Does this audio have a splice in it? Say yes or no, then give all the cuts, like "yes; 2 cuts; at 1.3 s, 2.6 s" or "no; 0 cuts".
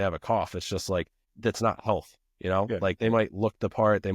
yes; 1 cut; at 1.2 s